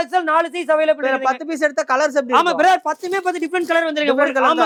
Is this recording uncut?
yes; 0 cuts

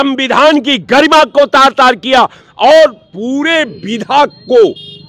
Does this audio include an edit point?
no; 0 cuts

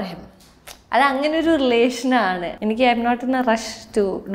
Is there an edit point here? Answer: yes; 1 cut; at 2.5 s

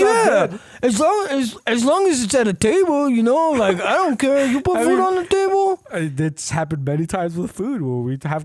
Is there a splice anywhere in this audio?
no; 0 cuts

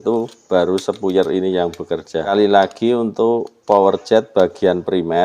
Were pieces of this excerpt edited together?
yes; 1 cut; at 2.3 s

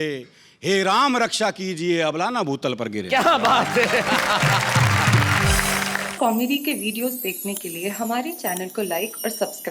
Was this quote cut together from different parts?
yes; 1 cut; at 6.0 s

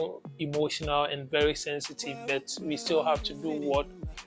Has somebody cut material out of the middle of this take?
no; 0 cuts

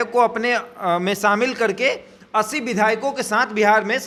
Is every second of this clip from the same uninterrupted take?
yes; 0 cuts

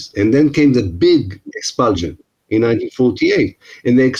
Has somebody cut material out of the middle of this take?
no; 0 cuts

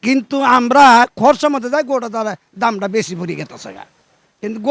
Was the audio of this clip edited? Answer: no; 0 cuts

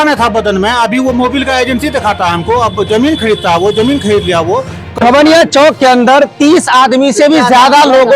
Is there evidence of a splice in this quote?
yes; 1 cut; at 5.0 s

